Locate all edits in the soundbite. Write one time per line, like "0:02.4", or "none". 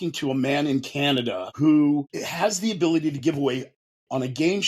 0:01.5
0:02.2